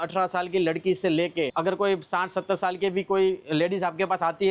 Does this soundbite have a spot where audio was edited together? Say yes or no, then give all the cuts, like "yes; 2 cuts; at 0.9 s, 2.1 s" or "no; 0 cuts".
no; 0 cuts